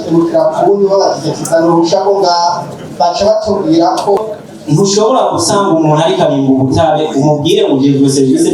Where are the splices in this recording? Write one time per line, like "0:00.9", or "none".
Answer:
0:04.2